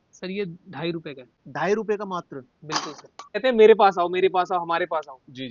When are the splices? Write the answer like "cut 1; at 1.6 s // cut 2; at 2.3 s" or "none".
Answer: none